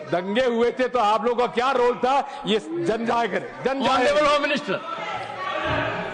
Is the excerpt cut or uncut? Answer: uncut